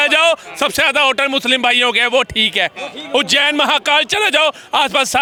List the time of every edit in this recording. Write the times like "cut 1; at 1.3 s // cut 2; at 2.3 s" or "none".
none